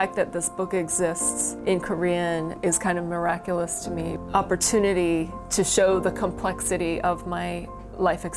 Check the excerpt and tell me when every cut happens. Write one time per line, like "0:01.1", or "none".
0:01.3
0:02.6
0:04.1